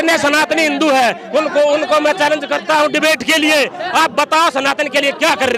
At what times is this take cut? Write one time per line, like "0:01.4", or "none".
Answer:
none